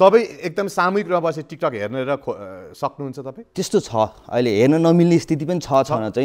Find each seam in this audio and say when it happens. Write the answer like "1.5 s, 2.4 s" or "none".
none